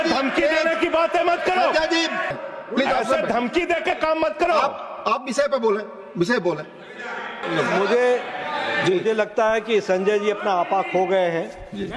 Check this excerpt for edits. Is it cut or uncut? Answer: cut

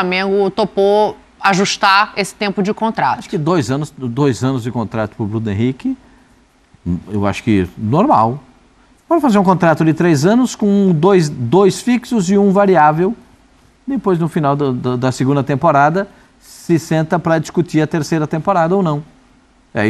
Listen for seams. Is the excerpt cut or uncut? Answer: uncut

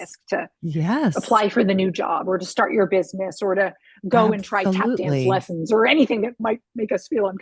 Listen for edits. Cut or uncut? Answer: cut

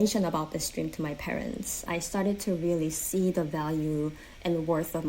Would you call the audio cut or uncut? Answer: cut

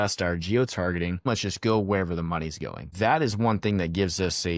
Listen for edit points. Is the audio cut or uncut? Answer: cut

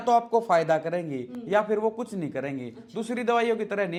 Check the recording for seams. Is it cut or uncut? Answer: uncut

